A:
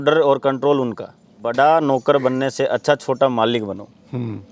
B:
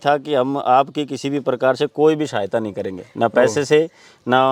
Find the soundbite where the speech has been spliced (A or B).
A